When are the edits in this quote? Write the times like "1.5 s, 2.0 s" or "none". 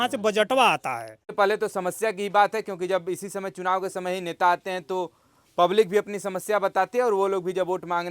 1.3 s